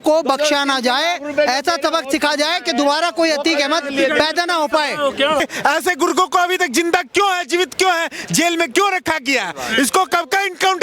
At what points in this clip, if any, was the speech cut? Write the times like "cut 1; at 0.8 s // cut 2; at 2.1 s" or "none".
cut 1; at 5.4 s